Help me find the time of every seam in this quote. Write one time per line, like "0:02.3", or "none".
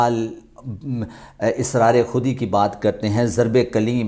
none